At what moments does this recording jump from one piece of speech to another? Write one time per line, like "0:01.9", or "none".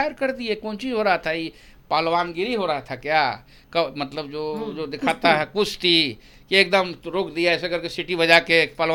none